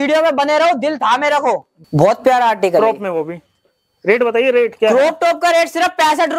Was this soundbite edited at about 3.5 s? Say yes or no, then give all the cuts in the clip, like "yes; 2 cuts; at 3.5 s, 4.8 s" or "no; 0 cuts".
no; 1 cut; at 1.7 s